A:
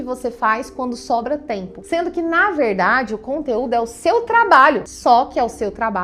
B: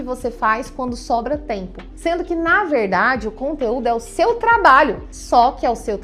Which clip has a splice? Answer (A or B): A